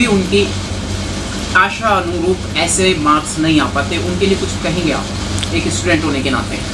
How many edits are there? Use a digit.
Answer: 0